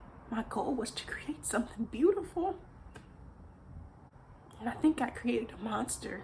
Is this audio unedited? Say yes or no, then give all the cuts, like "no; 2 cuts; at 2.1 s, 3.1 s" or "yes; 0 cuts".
no; 1 cut; at 4.1 s